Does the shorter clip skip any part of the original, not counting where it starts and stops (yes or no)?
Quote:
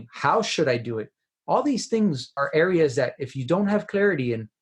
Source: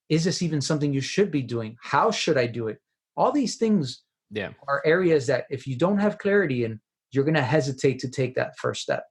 yes